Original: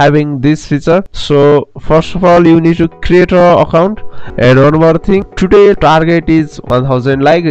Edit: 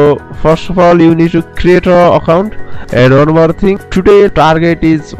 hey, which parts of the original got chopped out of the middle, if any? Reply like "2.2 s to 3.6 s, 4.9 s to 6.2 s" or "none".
none